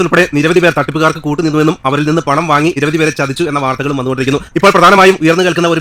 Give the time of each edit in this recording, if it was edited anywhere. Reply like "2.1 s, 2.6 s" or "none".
none